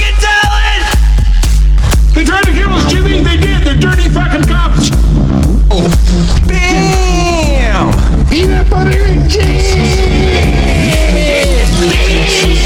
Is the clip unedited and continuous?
yes; 0 cuts

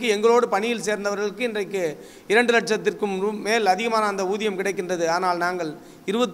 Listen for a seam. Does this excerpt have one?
no; 0 cuts

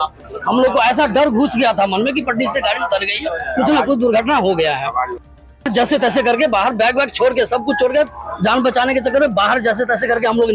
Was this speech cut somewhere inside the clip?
yes; 1 cut; at 5.7 s

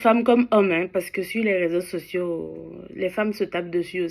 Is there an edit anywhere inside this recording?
no; 0 cuts

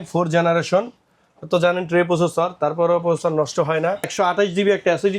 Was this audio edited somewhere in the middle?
yes; 1 cut; at 4.1 s

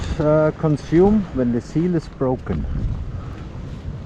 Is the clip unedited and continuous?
no; 1 cut; at 3.0 s

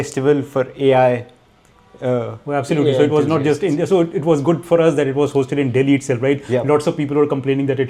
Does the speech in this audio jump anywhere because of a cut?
no; 0 cuts

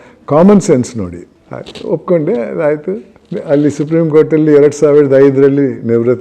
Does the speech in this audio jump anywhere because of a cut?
no; 0 cuts

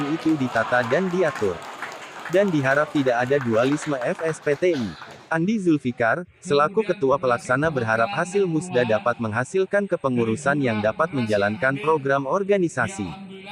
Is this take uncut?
yes; 0 cuts

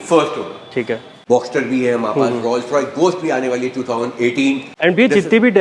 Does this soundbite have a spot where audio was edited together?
yes; 2 cuts; at 1.1 s, 4.7 s

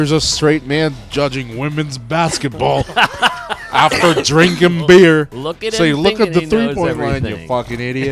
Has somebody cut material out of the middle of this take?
no; 0 cuts

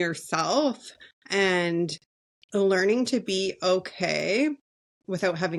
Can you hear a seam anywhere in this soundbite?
no; 0 cuts

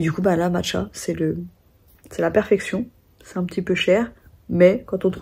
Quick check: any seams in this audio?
no; 0 cuts

